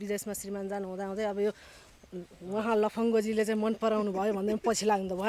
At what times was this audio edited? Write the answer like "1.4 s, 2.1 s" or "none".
none